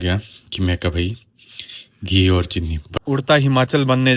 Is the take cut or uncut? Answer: cut